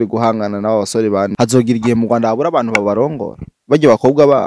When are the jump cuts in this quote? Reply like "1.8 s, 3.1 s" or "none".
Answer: 1.3 s

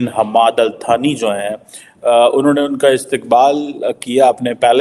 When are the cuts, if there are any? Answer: none

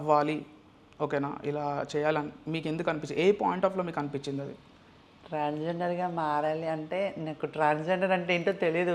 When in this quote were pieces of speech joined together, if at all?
none

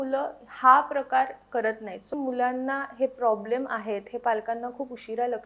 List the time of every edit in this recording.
2.1 s

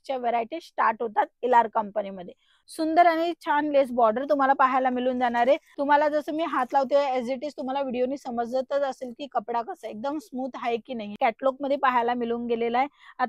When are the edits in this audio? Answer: 2.6 s, 5.7 s, 11.1 s

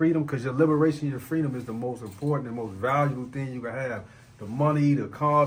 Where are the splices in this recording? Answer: none

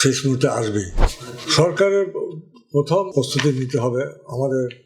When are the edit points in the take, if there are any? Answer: 1.0 s

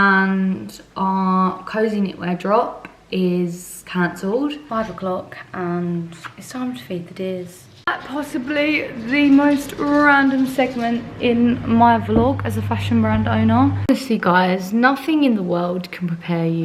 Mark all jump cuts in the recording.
4.6 s, 7.9 s, 13.8 s

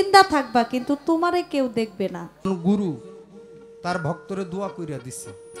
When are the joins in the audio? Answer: 2.5 s

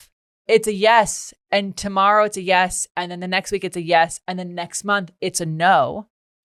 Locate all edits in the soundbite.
none

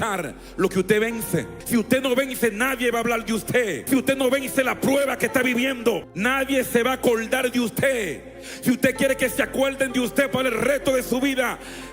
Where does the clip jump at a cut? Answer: 1.6 s, 3.8 s, 6.1 s

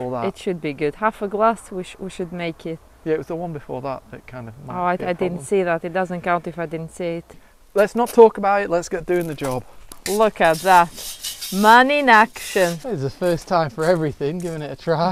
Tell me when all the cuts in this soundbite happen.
7.5 s, 9.9 s, 12.8 s

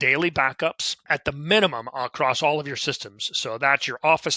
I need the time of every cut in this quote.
1.1 s

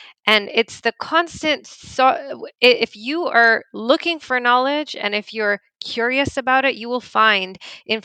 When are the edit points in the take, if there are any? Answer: none

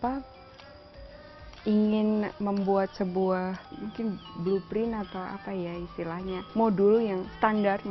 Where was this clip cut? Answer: 3.7 s

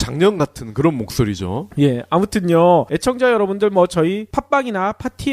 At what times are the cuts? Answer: 2.9 s

